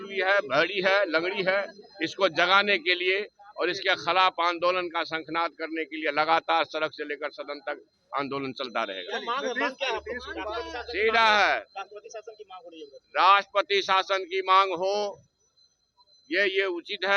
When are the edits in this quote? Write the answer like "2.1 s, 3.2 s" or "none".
none